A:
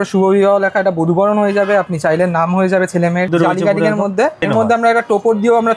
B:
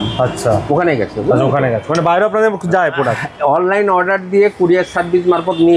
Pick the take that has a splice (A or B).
A